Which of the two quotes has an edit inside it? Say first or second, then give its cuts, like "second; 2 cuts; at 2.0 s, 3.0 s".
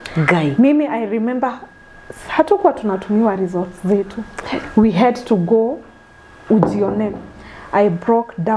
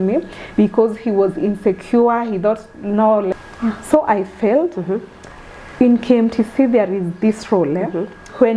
second; 1 cut; at 3.3 s